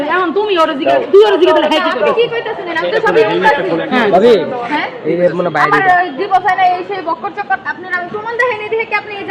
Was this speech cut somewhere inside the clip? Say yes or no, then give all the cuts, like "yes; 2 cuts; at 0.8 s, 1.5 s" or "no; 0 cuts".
no; 0 cuts